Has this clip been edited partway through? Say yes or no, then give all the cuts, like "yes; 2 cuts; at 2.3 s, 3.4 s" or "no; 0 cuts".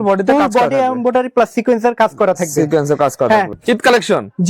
yes; 1 cut; at 3.5 s